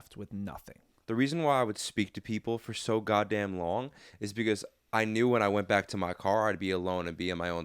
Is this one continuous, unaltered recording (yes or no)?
no